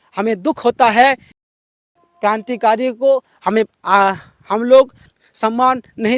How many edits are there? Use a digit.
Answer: 2